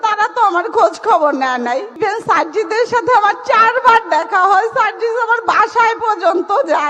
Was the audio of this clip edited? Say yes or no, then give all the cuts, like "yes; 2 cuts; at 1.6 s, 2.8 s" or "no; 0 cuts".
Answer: yes; 1 cut; at 1.9 s